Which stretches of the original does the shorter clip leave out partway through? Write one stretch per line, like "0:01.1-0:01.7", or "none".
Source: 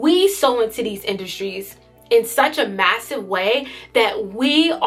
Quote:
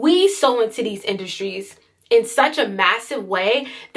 none

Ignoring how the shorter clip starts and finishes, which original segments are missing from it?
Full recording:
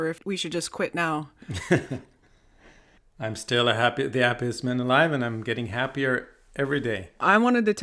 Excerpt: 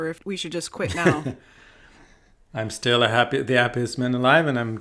0:01.0-0:01.7

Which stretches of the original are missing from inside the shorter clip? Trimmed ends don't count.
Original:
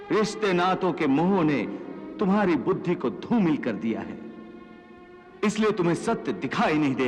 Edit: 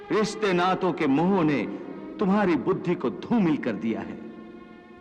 none

